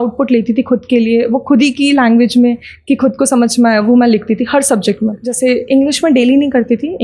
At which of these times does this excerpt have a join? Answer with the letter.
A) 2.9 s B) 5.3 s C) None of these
B